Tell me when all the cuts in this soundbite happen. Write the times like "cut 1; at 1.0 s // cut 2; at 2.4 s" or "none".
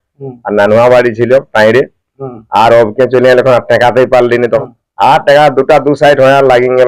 cut 1; at 4.6 s